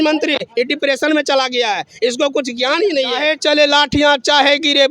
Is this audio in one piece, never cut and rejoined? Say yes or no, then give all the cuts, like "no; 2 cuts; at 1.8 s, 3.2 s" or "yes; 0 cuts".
no; 1 cut; at 3.2 s